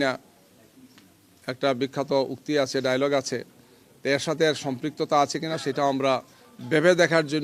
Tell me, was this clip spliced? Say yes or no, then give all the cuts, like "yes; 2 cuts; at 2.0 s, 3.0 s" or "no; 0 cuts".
no; 0 cuts